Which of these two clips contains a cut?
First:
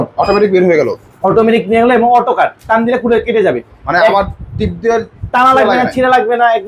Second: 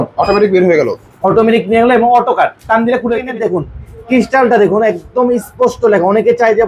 second; 1 cut; at 3.3 s

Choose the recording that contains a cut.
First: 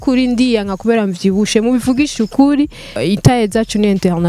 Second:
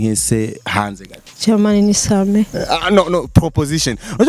first; 1 cut; at 2.9 s

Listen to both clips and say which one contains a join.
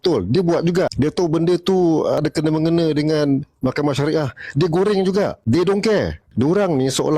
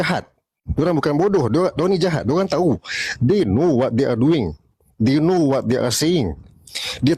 first; 4 cuts; at 0.9 s, 2.2 s, 5.4 s, 6.2 s

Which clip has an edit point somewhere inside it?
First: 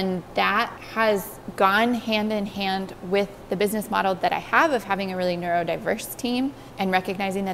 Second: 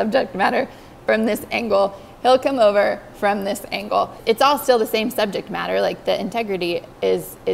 second; 1 cut; at 4.2 s

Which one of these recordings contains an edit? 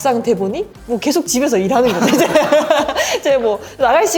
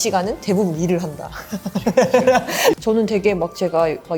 second; 1 cut; at 2.7 s

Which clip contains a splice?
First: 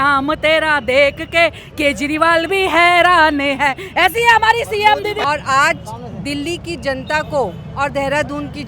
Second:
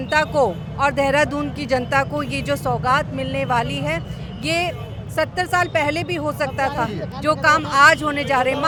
first; 1 cut; at 5.2 s

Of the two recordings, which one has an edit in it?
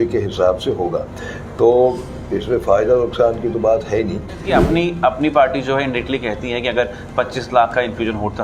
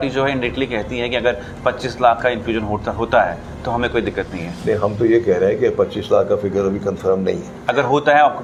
first; 1 cut; at 4.4 s

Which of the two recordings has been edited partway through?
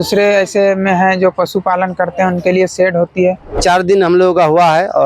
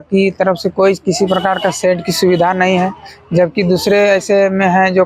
first; 1 cut; at 3.6 s

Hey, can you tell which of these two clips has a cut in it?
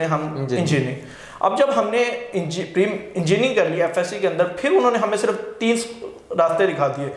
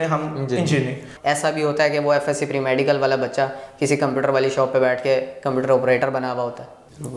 second; 1 cut; at 1.1 s

